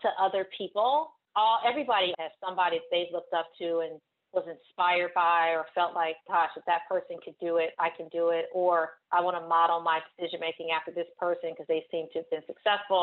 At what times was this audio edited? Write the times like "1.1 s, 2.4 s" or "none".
1.2 s